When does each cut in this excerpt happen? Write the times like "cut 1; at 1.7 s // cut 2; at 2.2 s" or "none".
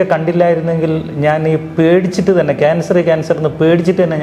none